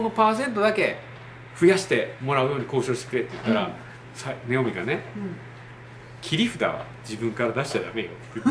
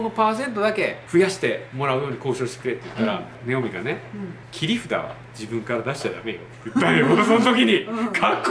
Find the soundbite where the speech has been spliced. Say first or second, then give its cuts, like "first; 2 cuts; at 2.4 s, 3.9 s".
second; 3 cuts; at 1.0 s, 3.4 s, 4.4 s